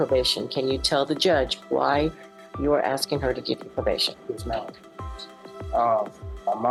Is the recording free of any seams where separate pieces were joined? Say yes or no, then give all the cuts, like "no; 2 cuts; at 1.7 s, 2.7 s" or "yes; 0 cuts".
yes; 0 cuts